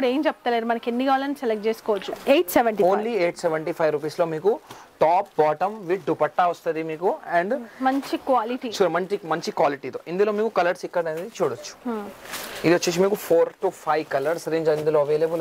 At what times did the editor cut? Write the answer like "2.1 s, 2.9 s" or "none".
none